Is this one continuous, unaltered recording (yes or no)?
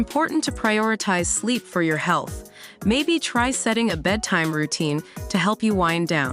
yes